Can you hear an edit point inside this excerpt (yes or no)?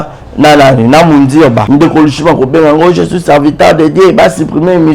yes